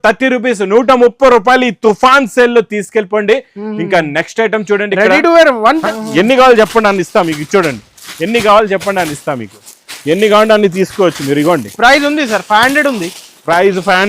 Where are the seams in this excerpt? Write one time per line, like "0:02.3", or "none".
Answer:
0:05.9